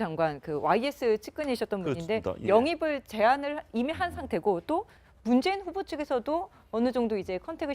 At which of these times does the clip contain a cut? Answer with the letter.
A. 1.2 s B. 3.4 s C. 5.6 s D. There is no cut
B